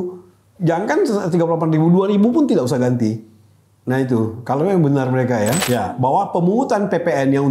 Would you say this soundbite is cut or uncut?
cut